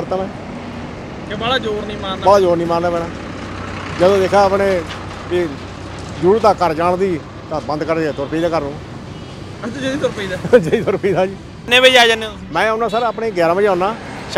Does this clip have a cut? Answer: yes; 1 cut; at 11.6 s

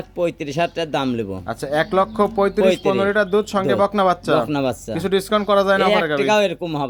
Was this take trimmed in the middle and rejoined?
no; 0 cuts

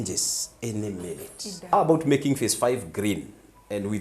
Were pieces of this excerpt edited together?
yes; 1 cut; at 1.7 s

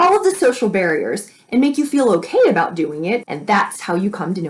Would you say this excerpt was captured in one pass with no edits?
no; 1 cut; at 3.3 s

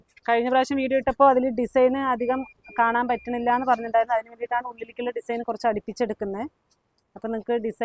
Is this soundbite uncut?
yes; 0 cuts

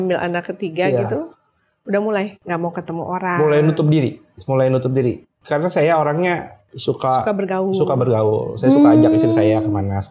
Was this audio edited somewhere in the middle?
no; 0 cuts

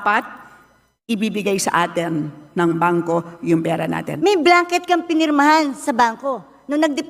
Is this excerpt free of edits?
no; 1 cut; at 4.1 s

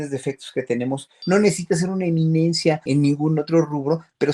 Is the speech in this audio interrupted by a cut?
yes; 2 cuts; at 1.1 s, 2.8 s

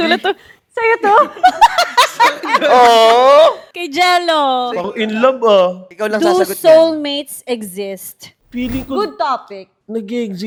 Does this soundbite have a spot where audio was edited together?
no; 0 cuts

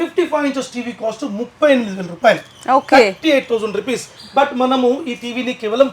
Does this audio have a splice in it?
no; 0 cuts

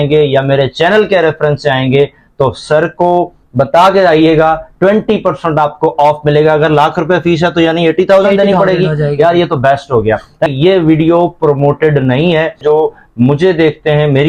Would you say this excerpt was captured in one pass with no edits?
no; 2 cuts; at 10.5 s, 12.6 s

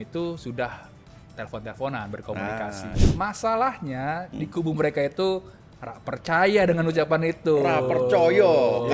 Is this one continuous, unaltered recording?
no; 1 cut; at 2.9 s

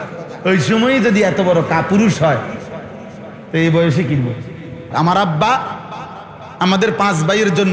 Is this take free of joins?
no; 1 cut; at 4.9 s

